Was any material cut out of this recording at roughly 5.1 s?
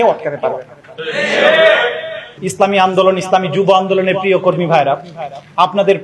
no; 1 cut; at 2.4 s

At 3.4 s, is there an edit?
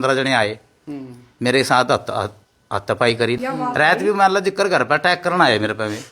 yes; 1 cut; at 3.4 s

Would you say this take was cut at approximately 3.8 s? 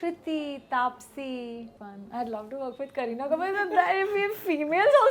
no; 1 cut; at 1.9 s

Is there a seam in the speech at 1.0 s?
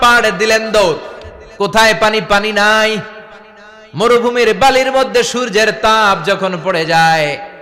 no; 0 cuts

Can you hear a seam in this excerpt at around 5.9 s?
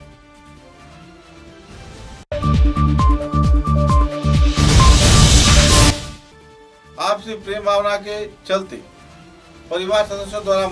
yes; 1 cut; at 5.9 s

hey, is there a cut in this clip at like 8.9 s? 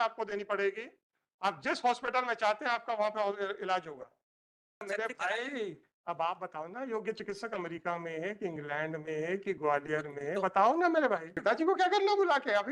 no; 2 cuts; at 4.9 s, 11.3 s

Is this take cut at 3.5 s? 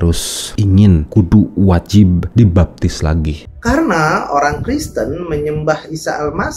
yes; 1 cut; at 3.5 s

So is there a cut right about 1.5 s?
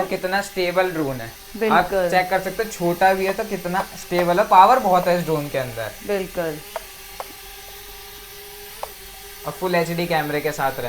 no; 0 cuts

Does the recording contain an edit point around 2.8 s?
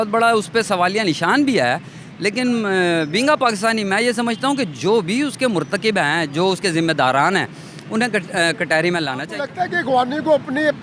no; 1 cut; at 9.2 s

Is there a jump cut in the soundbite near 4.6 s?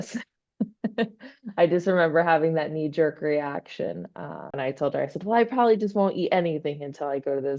yes; 1 cut; at 4.6 s

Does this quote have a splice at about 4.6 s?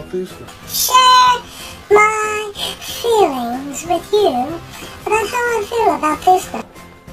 no; 0 cuts

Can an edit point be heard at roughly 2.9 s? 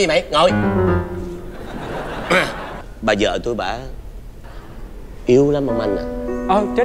yes; 1 cut; at 2.9 s

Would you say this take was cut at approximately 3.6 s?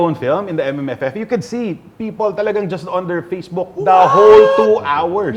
no; 0 cuts

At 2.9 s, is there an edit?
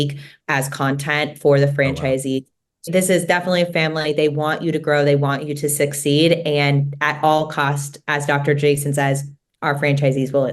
yes; 1 cut; at 2.9 s

